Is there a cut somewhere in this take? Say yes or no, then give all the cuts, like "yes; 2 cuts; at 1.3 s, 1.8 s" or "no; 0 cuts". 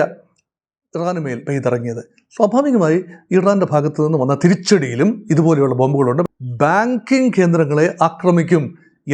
yes; 1 cut; at 6.3 s